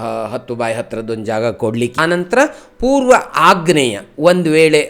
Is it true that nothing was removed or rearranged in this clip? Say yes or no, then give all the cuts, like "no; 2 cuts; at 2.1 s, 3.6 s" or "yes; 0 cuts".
no; 1 cut; at 1.9 s